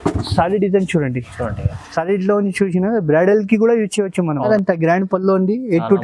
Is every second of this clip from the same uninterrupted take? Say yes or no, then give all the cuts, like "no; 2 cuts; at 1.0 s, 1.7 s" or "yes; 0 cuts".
no; 1 cut; at 4.5 s